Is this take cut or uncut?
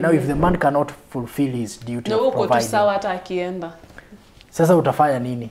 uncut